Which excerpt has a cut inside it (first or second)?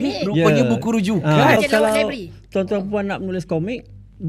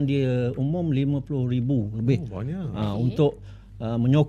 first